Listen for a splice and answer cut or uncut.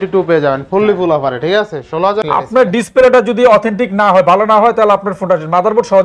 cut